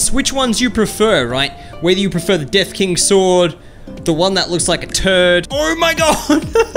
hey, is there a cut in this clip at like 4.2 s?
no; 1 cut; at 5.5 s

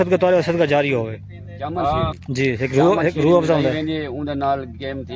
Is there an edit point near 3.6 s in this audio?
no; 1 cut; at 2.2 s

